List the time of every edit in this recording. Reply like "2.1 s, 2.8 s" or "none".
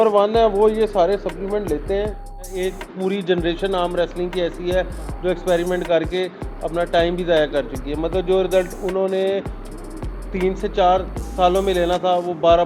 2.5 s